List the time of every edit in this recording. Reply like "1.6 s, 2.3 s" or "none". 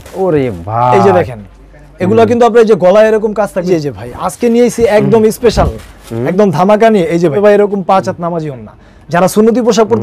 3.7 s, 7.4 s